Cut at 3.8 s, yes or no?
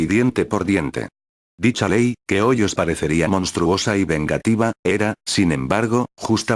no